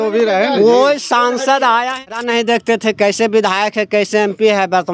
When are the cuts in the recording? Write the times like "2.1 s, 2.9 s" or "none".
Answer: 2.1 s